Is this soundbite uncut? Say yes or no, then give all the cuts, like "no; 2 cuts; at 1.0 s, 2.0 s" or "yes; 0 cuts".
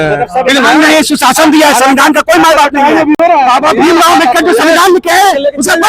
yes; 0 cuts